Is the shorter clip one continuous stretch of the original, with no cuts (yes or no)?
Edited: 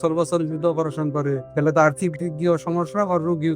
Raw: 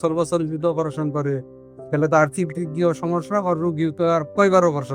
no